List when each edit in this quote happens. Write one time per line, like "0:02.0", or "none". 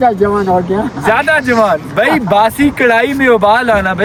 none